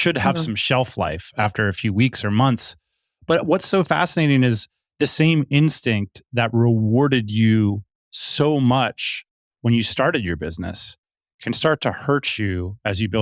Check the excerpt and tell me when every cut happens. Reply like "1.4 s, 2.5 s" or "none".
none